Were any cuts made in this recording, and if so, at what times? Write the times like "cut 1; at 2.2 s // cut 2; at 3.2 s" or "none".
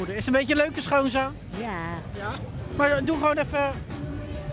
cut 1; at 2.6 s